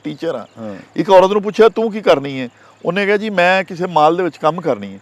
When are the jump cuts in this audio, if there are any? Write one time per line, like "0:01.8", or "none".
none